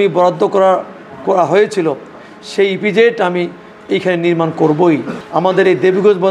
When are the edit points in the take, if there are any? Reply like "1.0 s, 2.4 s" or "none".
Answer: 5.2 s